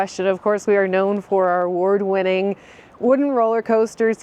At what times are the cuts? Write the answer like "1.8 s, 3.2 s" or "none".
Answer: none